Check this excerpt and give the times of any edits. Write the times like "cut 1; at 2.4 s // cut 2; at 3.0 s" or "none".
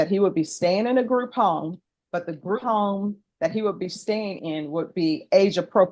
cut 1; at 2.6 s